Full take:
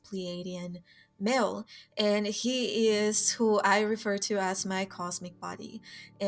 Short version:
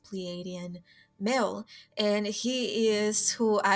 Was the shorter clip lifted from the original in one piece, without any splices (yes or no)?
yes